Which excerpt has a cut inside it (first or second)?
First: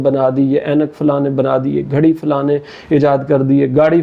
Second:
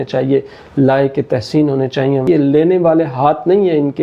second